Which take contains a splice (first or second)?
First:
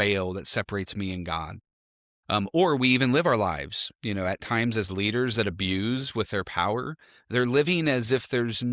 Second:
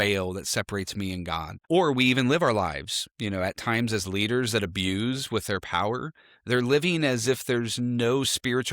second